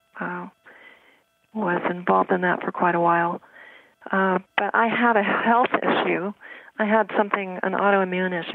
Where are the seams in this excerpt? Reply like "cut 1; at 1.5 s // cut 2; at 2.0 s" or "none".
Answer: none